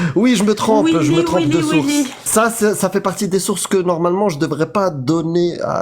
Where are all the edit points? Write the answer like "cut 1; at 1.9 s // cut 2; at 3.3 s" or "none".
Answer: cut 1; at 2.3 s